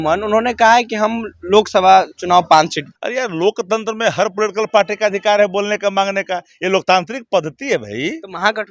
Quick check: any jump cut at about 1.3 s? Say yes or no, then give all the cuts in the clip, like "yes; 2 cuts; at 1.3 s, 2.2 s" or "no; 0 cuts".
no; 1 cut; at 2.9 s